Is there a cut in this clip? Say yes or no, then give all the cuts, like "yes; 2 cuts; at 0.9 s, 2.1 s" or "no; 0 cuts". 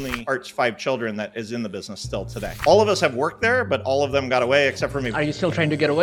yes; 1 cut; at 5.1 s